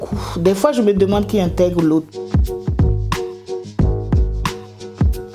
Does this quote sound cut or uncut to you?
cut